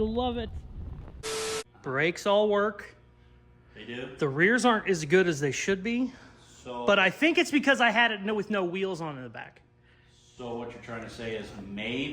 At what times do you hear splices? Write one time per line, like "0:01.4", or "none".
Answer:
0:01.4